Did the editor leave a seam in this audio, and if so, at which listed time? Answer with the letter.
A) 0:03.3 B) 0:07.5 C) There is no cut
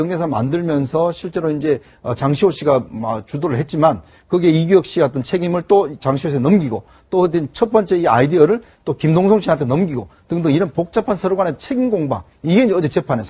B